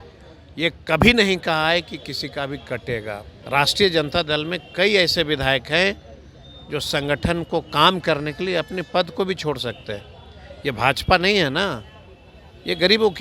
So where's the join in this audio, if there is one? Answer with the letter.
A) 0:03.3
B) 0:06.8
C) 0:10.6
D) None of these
A